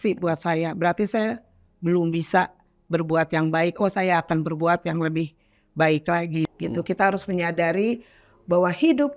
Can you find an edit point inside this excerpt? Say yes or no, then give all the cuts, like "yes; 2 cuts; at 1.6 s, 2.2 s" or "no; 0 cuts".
yes; 1 cut; at 6.5 s